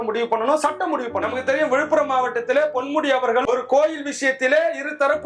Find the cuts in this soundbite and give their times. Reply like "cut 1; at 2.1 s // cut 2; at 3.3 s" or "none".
cut 1; at 1.2 s